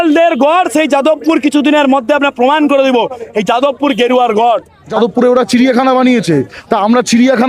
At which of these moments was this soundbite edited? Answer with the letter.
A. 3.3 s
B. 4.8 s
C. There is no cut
B